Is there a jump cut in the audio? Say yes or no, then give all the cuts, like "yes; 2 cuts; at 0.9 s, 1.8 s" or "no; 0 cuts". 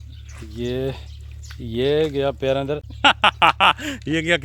yes; 1 cut; at 2.9 s